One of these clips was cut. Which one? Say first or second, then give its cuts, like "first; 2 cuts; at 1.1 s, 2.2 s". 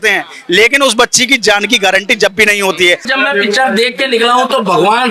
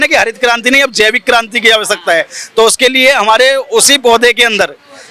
first; 1 cut; at 3.1 s